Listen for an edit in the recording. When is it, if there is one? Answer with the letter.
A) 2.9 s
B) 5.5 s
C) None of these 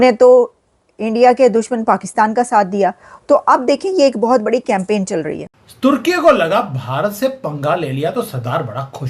B